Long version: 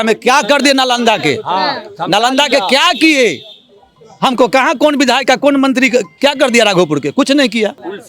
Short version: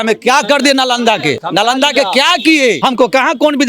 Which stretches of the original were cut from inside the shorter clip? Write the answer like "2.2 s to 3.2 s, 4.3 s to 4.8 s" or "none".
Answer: 1.4 s to 2.0 s, 3.3 s to 4.2 s